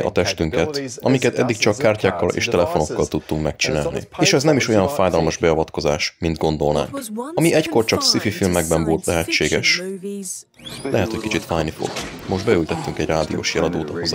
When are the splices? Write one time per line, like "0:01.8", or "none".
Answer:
0:06.1